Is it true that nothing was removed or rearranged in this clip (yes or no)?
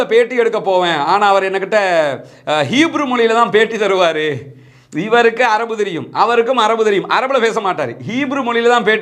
yes